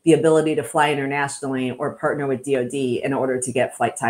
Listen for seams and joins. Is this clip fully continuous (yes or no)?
yes